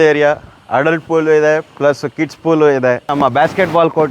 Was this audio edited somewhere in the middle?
yes; 1 cut; at 3.0 s

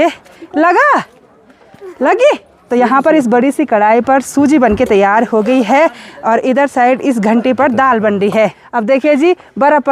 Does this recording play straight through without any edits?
no; 2 cuts; at 2.5 s, 8.7 s

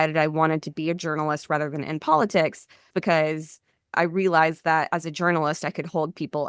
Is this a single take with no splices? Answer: no; 1 cut; at 2.9 s

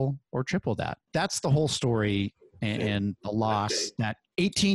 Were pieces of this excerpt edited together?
yes; 1 cut; at 0.9 s

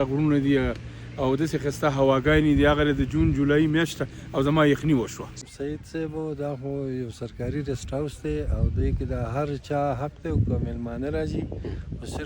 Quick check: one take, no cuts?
no; 1 cut; at 5.3 s

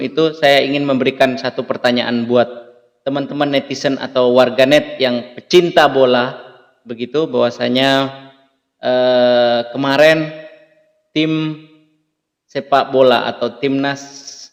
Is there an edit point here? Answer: no; 0 cuts

